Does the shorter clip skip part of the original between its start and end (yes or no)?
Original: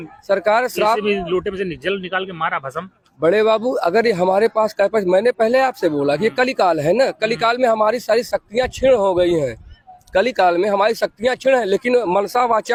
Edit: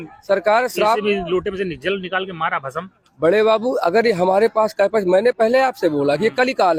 no